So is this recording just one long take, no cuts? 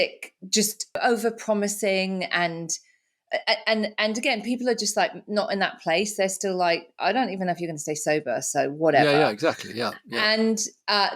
no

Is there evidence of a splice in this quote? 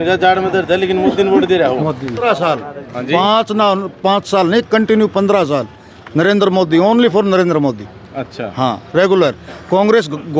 yes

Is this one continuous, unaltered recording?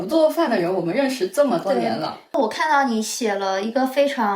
no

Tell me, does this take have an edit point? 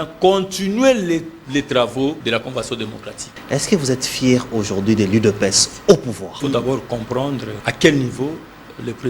yes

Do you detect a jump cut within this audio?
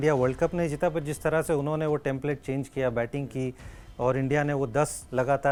no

